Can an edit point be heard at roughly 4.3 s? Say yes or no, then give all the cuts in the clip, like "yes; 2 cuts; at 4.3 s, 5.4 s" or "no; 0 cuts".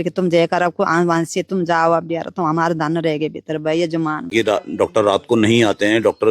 yes; 1 cut; at 4.3 s